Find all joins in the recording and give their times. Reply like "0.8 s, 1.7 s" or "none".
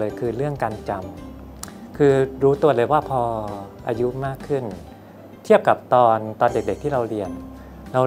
none